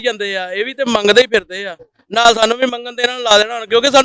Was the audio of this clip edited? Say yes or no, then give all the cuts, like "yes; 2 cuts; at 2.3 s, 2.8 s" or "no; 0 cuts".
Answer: no; 0 cuts